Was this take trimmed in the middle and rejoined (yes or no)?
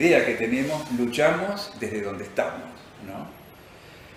no